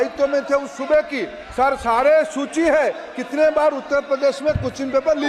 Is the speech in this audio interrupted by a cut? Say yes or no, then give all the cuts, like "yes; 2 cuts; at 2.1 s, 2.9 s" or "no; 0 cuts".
no; 0 cuts